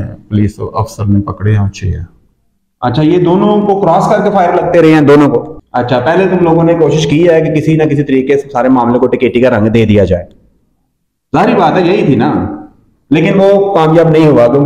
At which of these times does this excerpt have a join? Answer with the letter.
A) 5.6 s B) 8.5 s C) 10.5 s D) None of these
A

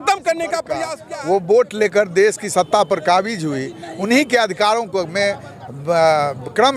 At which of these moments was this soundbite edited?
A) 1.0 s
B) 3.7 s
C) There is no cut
A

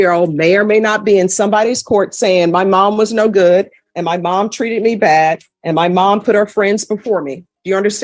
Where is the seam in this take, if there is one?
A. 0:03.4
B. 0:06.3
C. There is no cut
C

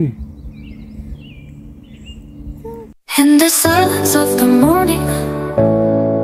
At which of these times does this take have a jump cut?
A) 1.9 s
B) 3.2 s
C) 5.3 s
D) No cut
B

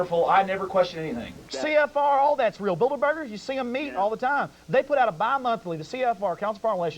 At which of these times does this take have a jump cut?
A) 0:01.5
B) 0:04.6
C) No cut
A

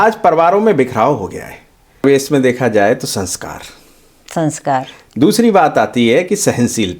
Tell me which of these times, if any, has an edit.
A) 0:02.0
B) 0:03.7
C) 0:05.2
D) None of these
A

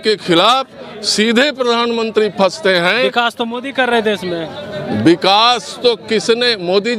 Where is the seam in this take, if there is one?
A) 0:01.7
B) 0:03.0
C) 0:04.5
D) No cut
D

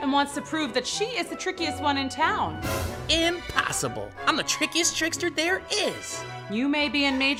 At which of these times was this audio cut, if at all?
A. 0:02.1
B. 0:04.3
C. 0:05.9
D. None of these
D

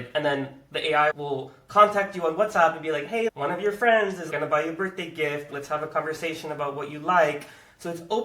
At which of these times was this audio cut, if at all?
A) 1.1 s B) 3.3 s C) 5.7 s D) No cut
B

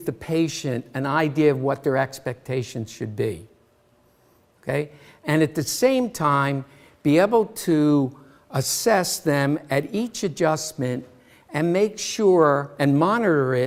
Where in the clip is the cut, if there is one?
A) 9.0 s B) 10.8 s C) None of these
C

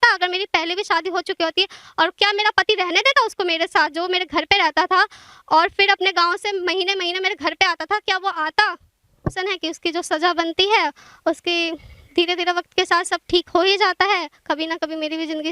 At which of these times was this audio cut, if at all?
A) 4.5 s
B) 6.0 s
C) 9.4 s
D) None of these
C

